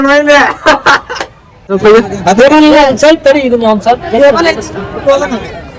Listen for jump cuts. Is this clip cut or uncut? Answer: cut